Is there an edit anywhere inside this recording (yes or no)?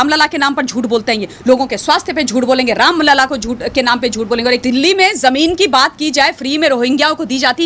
yes